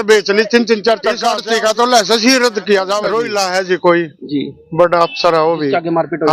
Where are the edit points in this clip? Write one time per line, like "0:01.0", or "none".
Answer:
0:01.3
0:03.1